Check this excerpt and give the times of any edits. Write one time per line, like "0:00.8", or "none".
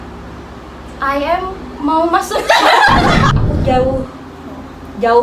0:03.3